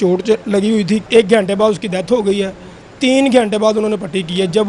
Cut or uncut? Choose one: cut